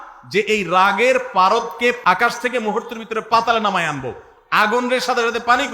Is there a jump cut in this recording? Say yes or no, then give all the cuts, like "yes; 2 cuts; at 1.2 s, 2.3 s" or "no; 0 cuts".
yes; 1 cut; at 2.0 s